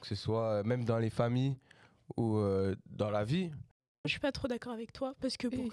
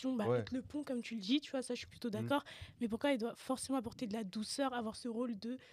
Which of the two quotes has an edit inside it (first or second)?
first